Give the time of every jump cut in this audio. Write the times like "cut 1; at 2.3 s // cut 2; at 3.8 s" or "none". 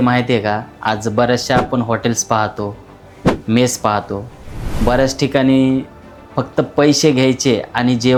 none